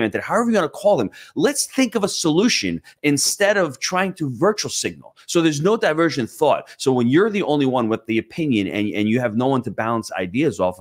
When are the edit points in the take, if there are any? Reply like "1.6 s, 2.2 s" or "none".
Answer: none